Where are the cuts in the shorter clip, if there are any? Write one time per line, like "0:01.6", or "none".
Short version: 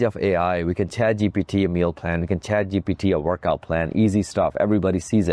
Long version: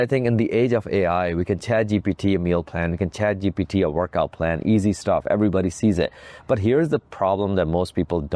none